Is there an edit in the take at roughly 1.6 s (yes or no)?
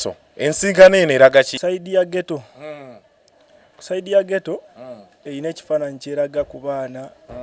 yes